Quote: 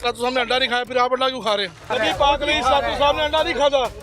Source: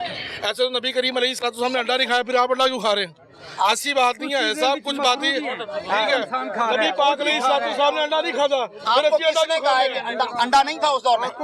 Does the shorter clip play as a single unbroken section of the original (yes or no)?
no